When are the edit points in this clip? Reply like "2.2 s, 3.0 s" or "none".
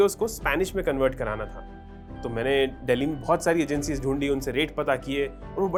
none